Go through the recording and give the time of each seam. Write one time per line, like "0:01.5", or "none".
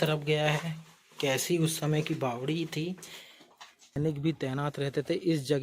0:03.9